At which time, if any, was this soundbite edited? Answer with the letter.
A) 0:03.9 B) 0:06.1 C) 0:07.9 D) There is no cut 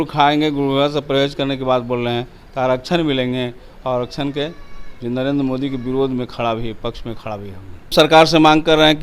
C